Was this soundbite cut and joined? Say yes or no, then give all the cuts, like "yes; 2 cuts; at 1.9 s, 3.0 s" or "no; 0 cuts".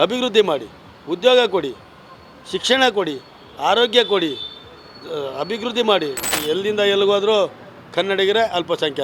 yes; 1 cut; at 6.4 s